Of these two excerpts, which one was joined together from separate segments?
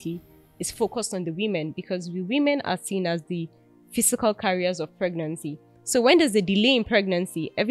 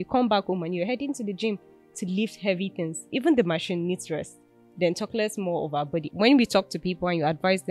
second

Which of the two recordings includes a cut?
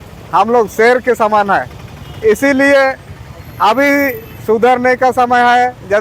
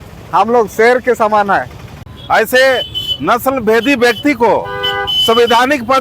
second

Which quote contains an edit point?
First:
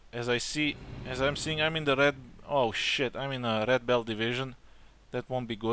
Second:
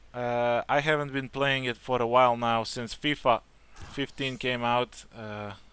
second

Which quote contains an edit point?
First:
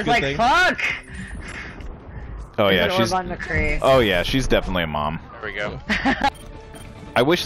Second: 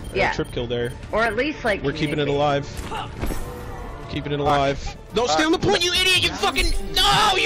first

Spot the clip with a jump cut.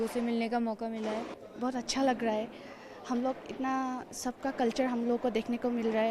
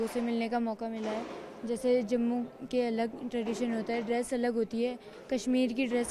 first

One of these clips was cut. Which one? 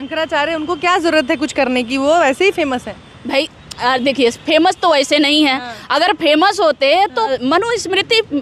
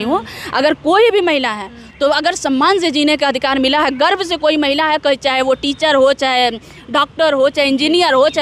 first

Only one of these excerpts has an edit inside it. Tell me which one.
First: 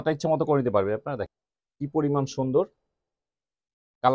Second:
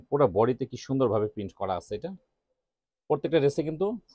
first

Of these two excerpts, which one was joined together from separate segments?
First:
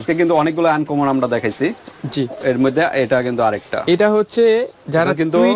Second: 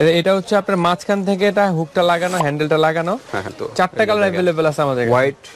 second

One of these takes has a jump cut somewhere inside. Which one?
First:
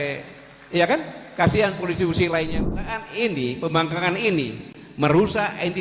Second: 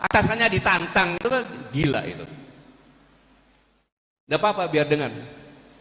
first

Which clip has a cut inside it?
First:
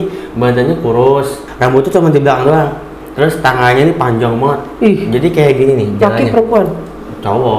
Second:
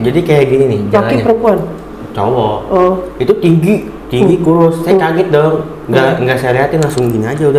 first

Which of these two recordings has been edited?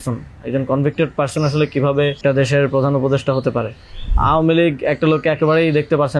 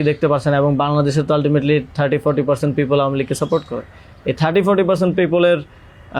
first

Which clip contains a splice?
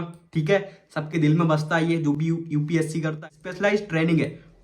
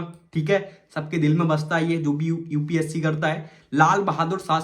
first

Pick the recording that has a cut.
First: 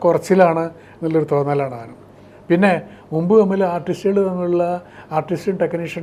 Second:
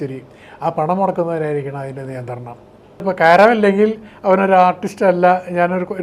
second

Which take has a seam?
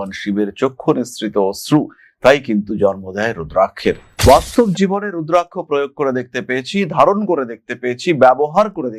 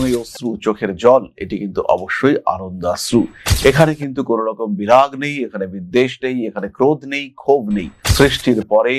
first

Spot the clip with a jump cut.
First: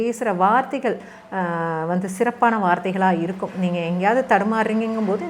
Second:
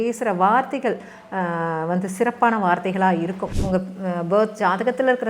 second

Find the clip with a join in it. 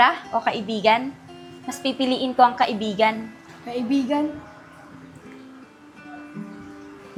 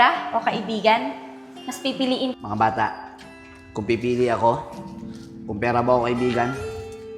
second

